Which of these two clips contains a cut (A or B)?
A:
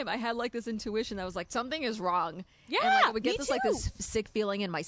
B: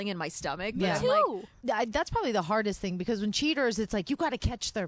B